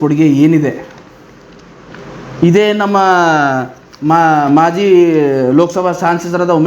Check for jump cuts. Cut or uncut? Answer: uncut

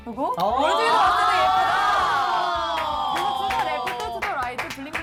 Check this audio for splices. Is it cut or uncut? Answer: uncut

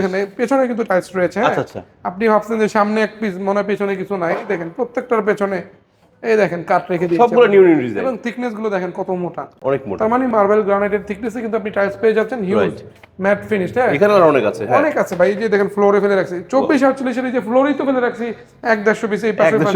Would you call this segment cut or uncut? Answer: uncut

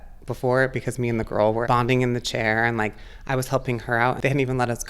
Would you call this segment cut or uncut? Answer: cut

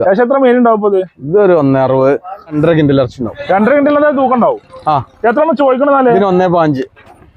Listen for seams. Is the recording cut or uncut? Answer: cut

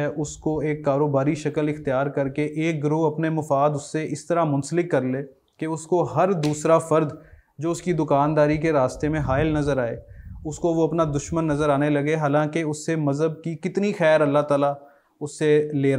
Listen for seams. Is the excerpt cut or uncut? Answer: uncut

